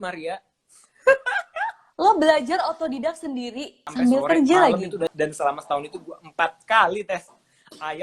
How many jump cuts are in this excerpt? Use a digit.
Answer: 2